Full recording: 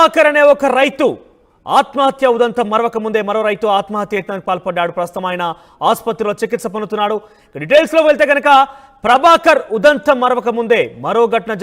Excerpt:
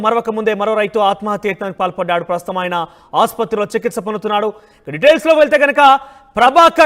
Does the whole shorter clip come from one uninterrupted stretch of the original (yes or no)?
yes